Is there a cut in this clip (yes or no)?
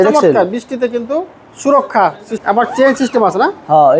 yes